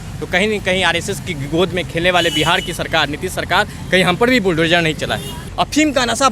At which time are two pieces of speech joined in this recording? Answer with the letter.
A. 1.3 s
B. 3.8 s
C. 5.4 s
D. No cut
C